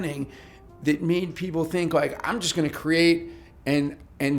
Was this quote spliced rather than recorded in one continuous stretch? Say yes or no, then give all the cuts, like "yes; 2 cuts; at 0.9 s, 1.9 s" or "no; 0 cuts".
no; 0 cuts